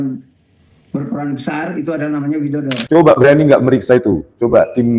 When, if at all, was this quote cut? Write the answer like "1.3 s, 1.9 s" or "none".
2.8 s